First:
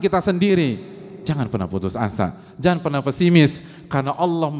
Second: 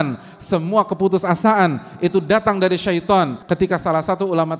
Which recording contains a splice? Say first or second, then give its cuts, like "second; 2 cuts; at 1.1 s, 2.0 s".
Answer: second; 1 cut; at 3.4 s